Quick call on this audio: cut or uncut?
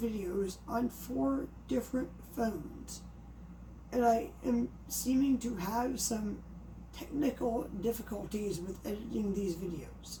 uncut